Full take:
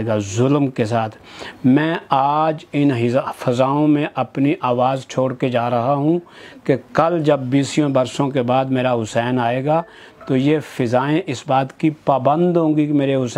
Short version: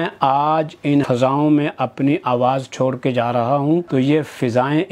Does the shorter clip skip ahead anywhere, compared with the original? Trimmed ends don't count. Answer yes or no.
yes